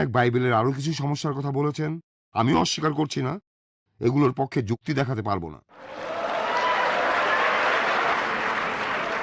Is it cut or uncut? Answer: cut